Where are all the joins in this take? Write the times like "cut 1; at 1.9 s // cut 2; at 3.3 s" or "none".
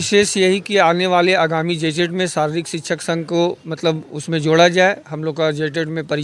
none